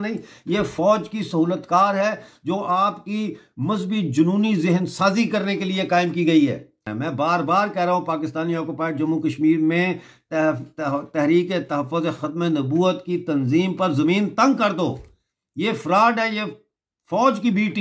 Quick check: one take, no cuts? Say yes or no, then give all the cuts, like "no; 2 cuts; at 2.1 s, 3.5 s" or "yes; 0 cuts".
no; 1 cut; at 6.9 s